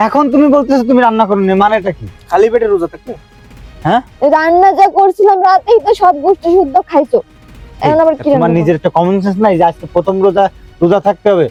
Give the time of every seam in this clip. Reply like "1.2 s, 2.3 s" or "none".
none